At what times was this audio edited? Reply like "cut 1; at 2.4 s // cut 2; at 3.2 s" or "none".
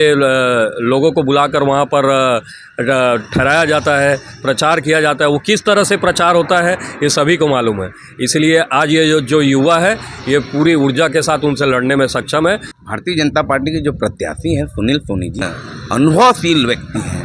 cut 1; at 12.7 s // cut 2; at 15.5 s